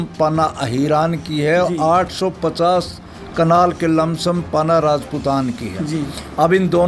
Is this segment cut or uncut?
uncut